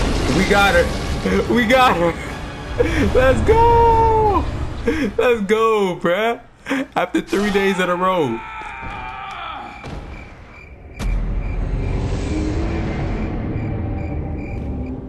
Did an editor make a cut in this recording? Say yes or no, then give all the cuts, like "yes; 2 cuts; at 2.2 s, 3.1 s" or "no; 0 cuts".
no; 0 cuts